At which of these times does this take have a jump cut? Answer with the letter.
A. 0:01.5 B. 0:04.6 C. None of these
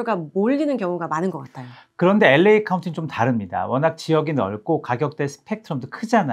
C